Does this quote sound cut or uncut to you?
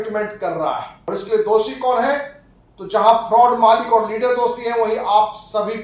cut